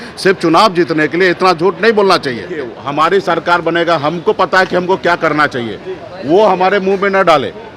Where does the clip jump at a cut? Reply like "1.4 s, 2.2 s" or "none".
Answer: 2.8 s